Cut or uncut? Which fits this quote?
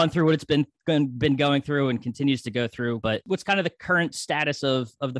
cut